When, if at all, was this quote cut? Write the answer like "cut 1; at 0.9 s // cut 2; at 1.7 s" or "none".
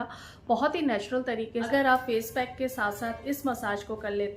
cut 1; at 1.7 s